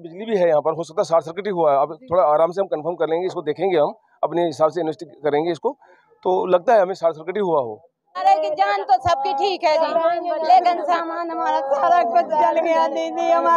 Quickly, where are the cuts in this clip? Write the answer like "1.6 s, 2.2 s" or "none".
8.2 s